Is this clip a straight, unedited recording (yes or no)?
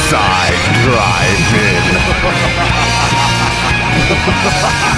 yes